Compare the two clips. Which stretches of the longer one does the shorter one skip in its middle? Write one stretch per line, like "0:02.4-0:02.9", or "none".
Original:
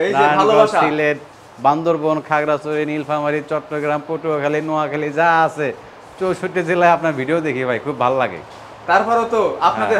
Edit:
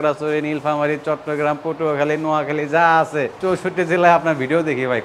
0:05.8-0:06.1

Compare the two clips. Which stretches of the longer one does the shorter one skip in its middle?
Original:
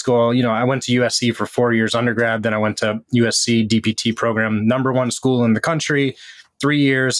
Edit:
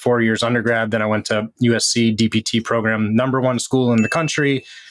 none

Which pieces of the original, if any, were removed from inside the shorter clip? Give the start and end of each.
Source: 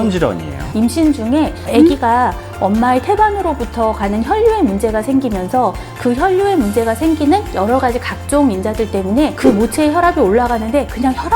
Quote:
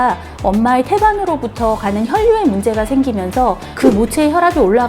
0:05.9-0:09.3

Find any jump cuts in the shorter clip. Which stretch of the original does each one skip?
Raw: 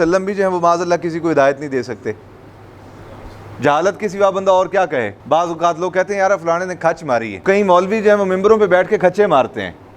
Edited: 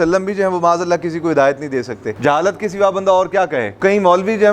0:02.1-0:03.5
0:05.1-0:07.4

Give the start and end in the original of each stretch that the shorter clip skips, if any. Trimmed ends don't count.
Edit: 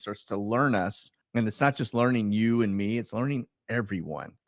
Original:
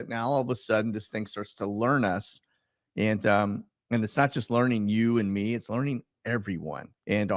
0:02.4-0:03.7

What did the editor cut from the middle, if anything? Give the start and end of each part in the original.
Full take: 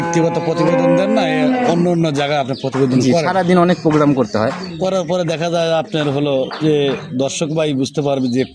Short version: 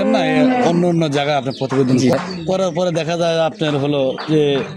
0:03.2-0:04.5

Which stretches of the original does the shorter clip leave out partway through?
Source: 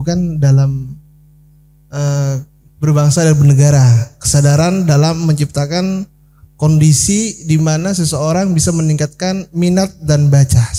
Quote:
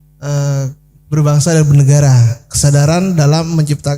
none

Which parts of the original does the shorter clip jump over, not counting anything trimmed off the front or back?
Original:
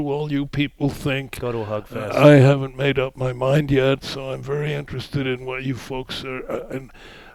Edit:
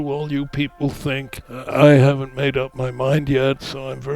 0:01.4-0:01.8

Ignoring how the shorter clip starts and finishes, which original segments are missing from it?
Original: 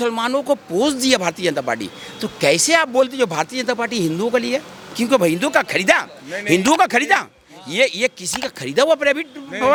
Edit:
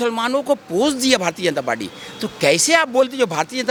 none

